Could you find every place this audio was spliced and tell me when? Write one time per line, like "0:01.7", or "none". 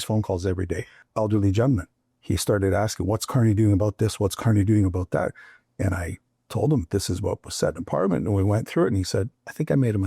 0:00.9